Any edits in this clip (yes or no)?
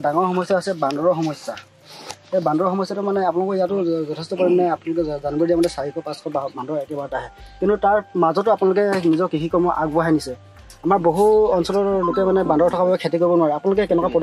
no